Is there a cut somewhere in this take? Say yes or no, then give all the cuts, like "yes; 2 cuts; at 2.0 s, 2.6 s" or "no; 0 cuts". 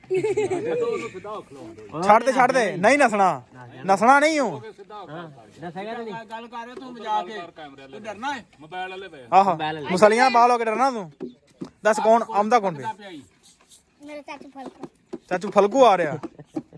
no; 0 cuts